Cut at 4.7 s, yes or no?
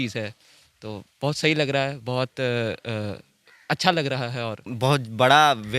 yes